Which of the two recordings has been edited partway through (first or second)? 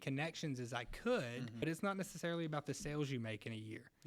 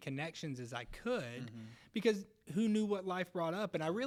first